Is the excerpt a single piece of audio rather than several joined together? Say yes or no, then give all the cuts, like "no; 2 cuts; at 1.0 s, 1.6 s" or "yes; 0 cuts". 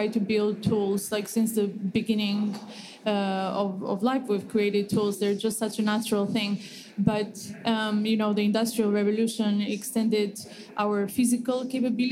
yes; 0 cuts